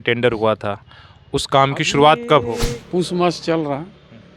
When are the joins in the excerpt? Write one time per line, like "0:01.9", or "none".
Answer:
0:02.7